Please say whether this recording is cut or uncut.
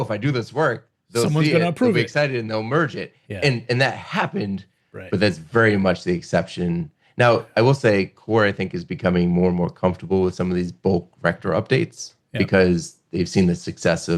uncut